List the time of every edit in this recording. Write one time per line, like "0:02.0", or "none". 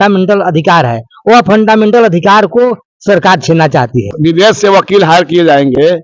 0:04.1